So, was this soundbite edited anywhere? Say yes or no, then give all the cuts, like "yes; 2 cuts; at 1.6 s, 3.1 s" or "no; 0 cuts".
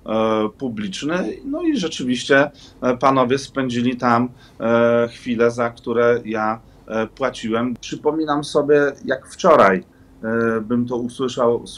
yes; 1 cut; at 7.8 s